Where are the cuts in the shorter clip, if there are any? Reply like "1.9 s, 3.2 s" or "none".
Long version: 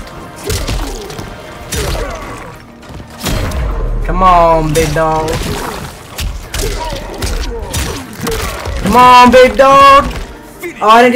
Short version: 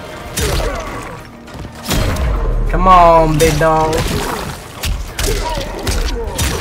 none